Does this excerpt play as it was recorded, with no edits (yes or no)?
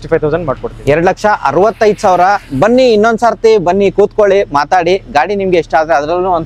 yes